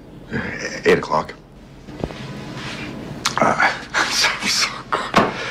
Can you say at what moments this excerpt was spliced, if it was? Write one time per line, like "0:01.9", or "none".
0:02.0